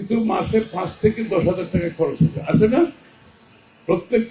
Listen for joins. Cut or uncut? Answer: uncut